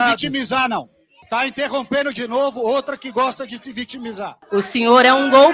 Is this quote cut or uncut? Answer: cut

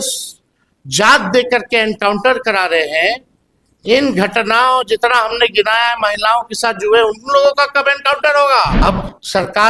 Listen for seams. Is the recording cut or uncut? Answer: cut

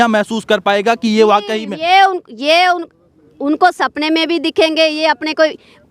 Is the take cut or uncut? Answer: uncut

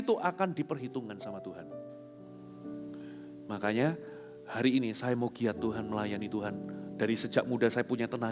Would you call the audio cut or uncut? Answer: uncut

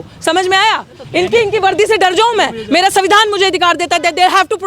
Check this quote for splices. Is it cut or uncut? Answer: cut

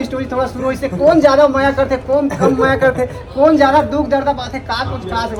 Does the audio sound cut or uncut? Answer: uncut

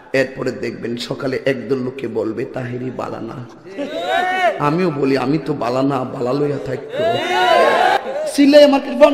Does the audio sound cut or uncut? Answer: cut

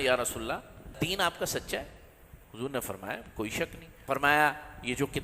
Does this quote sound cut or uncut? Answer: cut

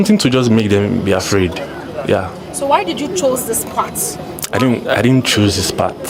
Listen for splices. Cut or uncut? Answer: uncut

